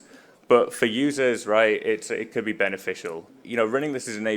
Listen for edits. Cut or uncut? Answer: cut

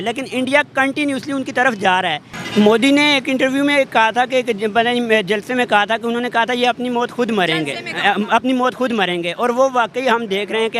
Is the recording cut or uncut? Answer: cut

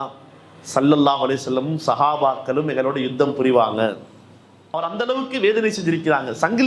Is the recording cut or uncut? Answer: cut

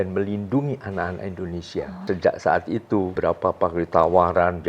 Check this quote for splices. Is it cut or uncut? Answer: cut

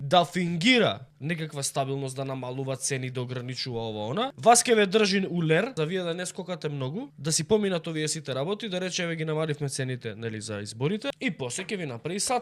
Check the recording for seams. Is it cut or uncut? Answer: cut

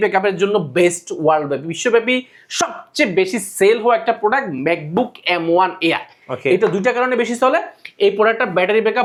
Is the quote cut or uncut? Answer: uncut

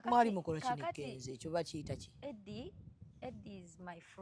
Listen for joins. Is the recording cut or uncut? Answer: uncut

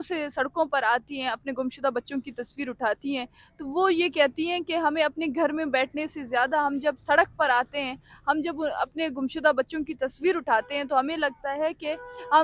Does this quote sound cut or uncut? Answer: uncut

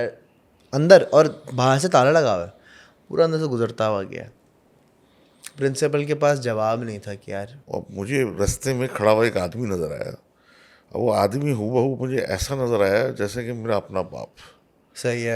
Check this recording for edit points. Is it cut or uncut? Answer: cut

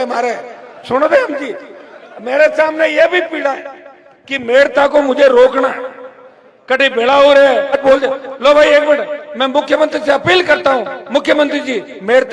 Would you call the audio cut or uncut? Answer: cut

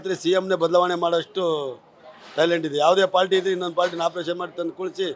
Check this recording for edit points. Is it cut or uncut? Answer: uncut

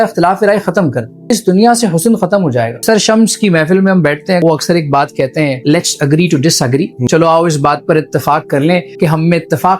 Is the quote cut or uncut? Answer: cut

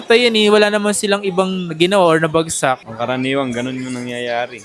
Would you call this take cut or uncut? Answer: cut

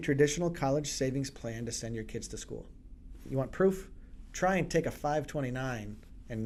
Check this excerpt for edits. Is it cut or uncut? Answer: uncut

